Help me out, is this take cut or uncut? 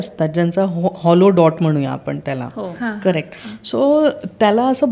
uncut